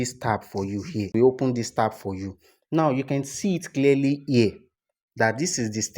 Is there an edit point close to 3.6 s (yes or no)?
no